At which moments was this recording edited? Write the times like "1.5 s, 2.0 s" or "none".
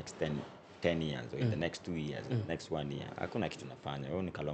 none

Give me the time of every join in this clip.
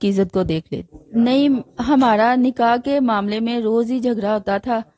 0.9 s

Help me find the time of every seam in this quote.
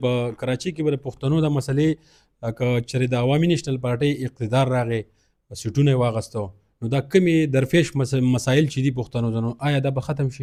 none

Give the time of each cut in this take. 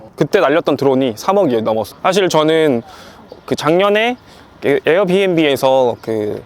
1.9 s

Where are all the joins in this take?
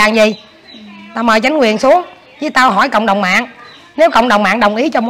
none

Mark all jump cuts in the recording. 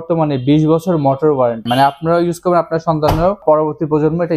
1.7 s, 3.4 s

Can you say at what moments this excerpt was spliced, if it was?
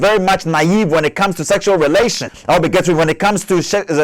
2.3 s

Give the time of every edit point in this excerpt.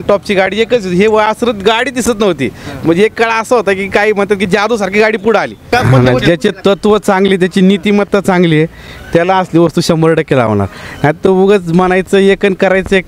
5.7 s

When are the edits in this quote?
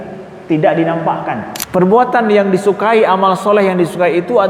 1.5 s

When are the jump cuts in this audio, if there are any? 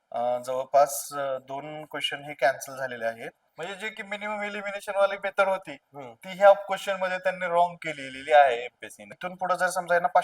3.5 s, 9.2 s

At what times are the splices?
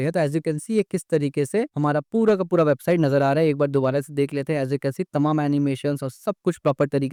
none

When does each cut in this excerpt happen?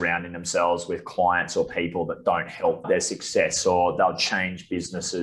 2.8 s

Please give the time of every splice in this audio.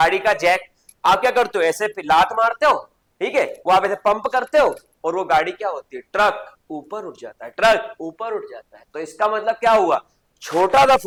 none

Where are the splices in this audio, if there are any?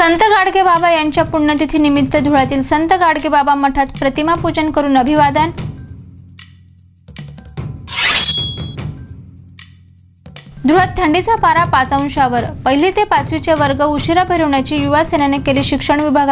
none

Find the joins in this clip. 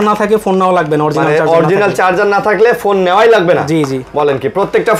none

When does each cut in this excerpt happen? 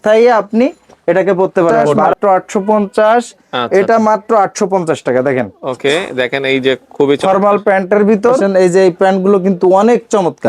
2.1 s, 8.5 s

